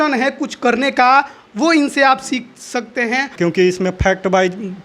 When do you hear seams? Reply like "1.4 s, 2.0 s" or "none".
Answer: 3.3 s